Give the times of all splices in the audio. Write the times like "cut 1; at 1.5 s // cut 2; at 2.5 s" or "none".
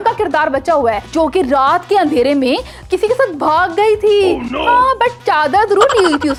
none